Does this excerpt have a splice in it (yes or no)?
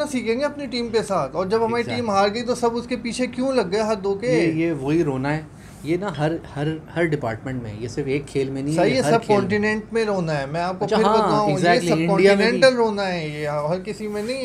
no